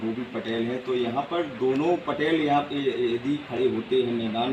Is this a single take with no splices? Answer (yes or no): yes